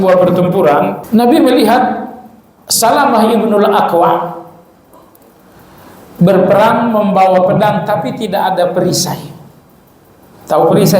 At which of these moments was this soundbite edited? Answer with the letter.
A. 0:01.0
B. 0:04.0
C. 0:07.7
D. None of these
A